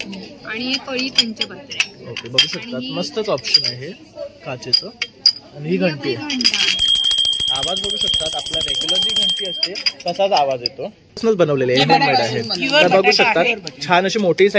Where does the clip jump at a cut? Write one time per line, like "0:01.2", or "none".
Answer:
0:11.2

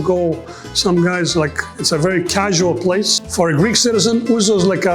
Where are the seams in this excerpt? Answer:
0:03.2

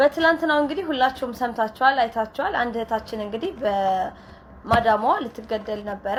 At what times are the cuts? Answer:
none

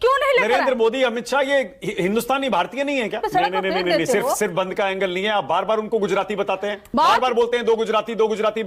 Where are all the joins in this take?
none

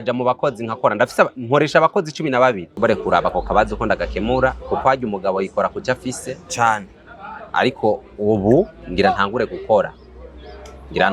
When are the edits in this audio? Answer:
0:02.7

